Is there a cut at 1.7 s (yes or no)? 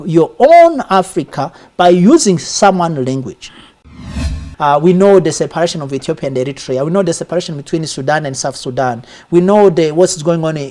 no